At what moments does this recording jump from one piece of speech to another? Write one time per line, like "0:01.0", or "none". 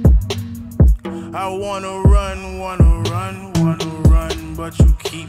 0:01.0